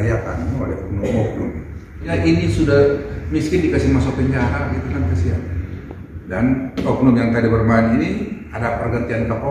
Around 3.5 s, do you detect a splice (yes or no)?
no